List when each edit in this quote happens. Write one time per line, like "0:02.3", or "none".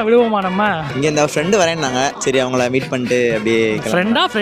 0:00.9
0:02.2